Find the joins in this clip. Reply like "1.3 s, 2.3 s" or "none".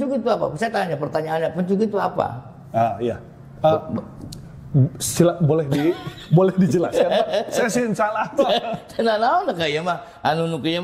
none